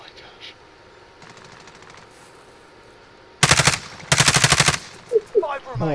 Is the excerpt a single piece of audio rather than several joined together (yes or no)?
yes